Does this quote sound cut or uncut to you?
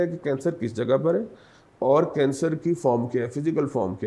uncut